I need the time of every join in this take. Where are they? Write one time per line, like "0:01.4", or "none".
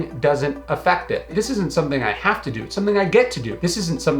0:01.3